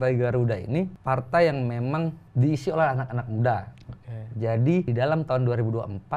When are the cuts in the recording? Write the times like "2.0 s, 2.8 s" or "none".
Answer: 1.0 s, 2.2 s, 4.9 s